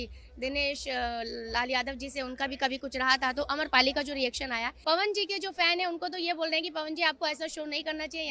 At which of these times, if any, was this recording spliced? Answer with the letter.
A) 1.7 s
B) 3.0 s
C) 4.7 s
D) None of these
C